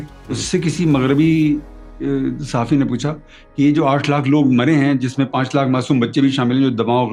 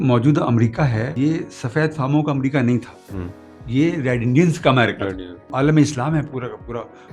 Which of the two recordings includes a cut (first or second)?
second